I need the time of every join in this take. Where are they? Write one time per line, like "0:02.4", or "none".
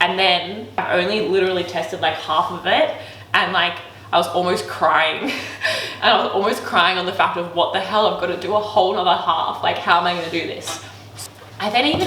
0:00.8
0:11.1